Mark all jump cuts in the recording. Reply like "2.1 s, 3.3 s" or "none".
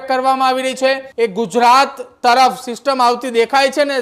1.1 s